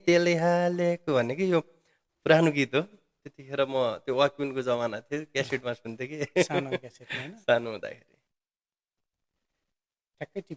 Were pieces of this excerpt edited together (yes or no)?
no